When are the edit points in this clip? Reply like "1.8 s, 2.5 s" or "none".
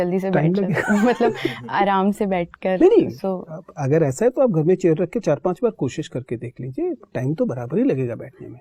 none